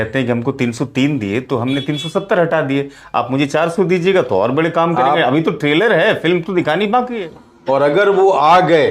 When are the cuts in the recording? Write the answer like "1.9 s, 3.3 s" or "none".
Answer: 7.1 s